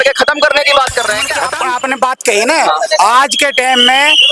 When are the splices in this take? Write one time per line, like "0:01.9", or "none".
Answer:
0:01.4